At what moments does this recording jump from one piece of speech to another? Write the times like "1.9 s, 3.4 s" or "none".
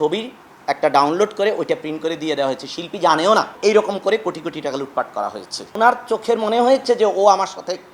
3.5 s, 5.6 s